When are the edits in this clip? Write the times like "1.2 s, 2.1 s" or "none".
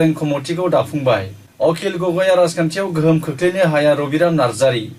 1.4 s